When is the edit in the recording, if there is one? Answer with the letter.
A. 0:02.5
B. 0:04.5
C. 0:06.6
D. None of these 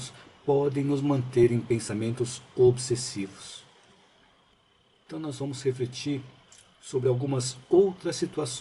B